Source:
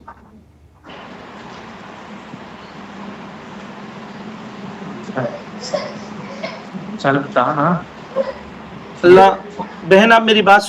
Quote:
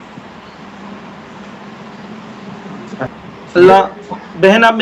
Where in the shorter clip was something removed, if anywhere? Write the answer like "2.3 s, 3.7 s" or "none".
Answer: 3.1 s